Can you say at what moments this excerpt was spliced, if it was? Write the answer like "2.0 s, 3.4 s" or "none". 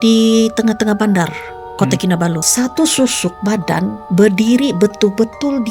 2.4 s, 4.0 s

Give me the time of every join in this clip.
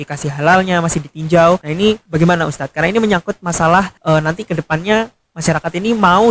2.0 s, 3.9 s, 5.2 s

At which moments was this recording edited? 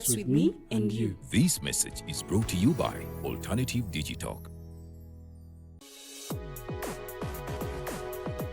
5.6 s

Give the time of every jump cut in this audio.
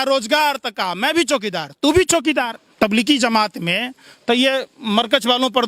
2.6 s

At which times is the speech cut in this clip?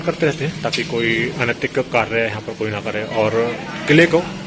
none

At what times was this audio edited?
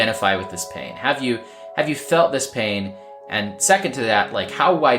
none

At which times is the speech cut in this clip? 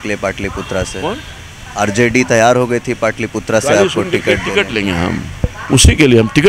5.5 s

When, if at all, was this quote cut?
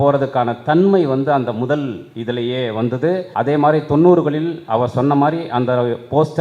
3.3 s

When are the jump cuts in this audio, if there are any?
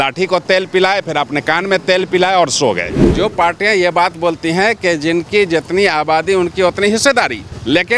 3.0 s

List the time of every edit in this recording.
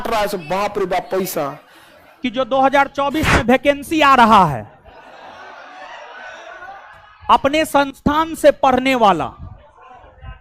2.2 s

